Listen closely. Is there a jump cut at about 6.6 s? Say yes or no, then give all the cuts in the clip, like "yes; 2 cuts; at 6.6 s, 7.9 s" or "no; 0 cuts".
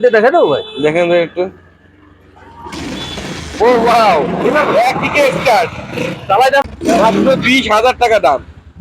yes; 1 cut; at 6.6 s